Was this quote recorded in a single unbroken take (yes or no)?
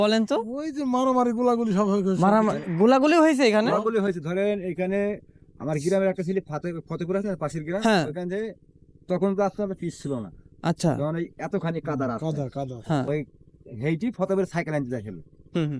yes